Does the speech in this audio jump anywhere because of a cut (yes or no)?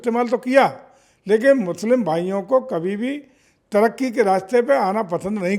no